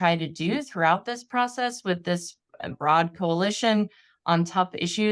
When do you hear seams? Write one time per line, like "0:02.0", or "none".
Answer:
0:02.8